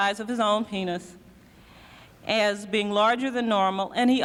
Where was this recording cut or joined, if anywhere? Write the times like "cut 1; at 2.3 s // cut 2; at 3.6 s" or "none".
none